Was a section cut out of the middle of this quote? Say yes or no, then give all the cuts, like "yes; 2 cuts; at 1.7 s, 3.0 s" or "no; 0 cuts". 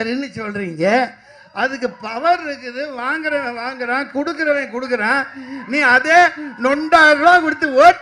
no; 0 cuts